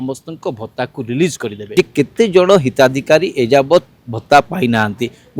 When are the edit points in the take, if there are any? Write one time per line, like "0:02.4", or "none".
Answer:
0:01.6